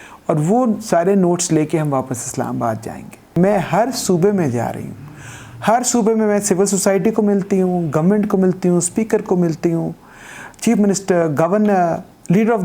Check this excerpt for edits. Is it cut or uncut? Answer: cut